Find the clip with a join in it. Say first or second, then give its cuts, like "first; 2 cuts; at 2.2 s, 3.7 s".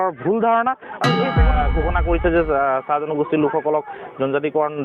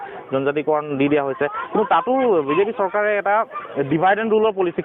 first; 1 cut; at 1.4 s